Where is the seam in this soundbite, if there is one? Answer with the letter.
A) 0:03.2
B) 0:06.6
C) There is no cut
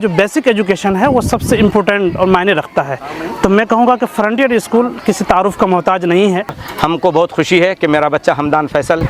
B